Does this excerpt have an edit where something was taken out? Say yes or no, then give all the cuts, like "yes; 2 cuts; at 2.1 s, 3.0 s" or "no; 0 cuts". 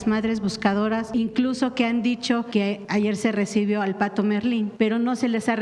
yes; 3 cuts; at 1.1 s, 2.7 s, 4.7 s